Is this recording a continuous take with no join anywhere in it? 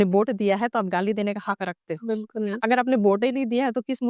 yes; 0 cuts

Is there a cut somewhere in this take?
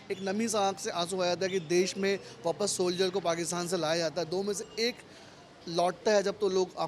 no; 0 cuts

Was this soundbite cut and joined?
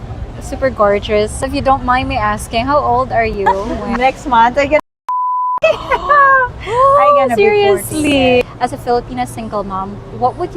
yes; 3 cuts; at 1.4 s, 3.5 s, 8.4 s

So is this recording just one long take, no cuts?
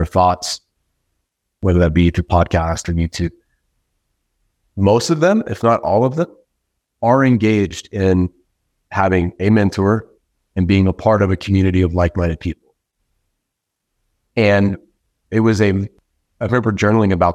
no; 1 cut; at 1.6 s

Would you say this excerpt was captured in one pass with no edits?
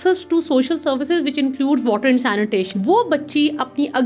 no; 1 cut; at 2.7 s

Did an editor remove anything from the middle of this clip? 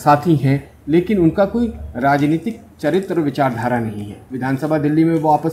yes; 1 cut; at 4.2 s

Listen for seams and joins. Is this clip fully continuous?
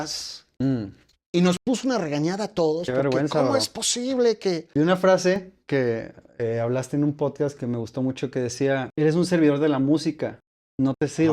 no; 2 cuts; at 4.6 s, 8.9 s

